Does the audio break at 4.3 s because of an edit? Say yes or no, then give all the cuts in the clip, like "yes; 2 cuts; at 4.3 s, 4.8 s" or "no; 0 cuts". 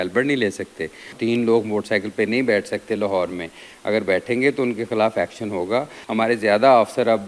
no; 2 cuts; at 1.1 s, 6.0 s